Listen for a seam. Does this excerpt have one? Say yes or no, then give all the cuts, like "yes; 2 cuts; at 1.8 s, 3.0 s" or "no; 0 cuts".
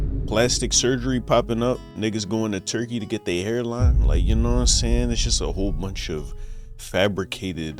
no; 0 cuts